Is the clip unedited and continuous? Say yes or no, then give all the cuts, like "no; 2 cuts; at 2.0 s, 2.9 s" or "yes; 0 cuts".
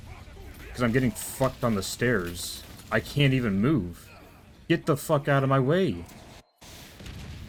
yes; 0 cuts